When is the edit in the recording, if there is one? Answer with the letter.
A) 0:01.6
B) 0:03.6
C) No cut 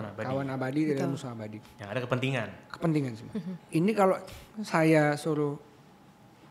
B